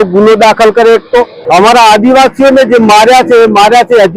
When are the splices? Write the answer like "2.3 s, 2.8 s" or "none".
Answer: 1.4 s